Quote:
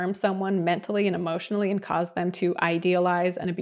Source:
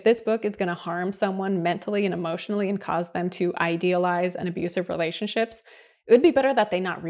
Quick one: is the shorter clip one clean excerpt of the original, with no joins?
yes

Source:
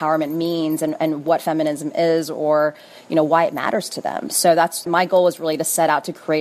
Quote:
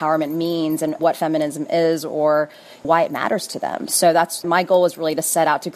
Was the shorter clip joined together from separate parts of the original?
yes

